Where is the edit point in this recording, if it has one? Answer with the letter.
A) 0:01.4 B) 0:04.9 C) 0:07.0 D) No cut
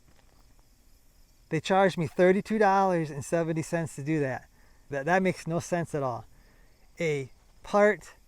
B